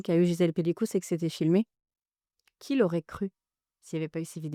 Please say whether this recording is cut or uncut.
uncut